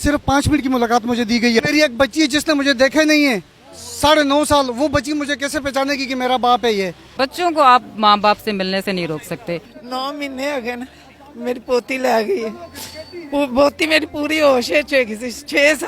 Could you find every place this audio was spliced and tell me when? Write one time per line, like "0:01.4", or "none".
0:01.6
0:07.0
0:09.8